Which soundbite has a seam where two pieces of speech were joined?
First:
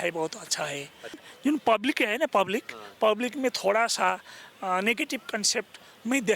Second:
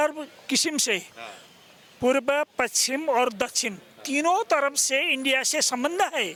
first; 1 cut; at 1.2 s

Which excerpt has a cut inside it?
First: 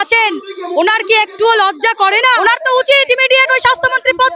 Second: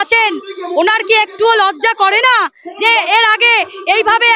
first; 1 cut; at 2.4 s

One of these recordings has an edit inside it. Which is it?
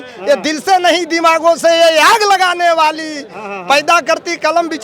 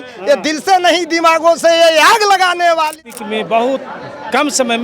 second; 1 cut; at 3.1 s

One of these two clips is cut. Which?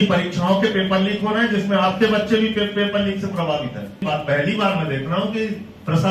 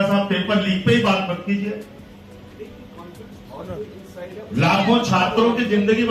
first; 1 cut; at 4.0 s

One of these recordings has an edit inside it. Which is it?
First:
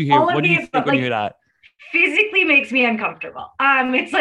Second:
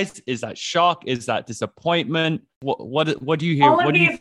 second; 1 cut; at 2.6 s

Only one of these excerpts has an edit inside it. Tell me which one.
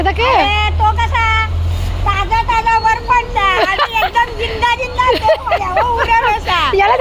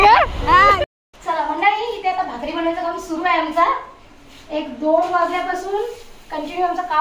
second; 1 cut; at 1.1 s

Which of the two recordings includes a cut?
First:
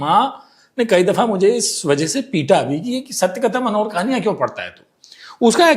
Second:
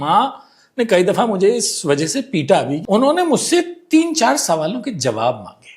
second; 1 cut; at 2.8 s

